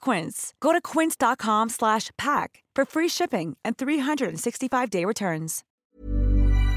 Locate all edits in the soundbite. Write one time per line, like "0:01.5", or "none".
0:05.9